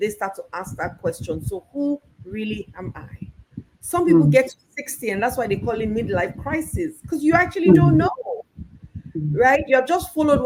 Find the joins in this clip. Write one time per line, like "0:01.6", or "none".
none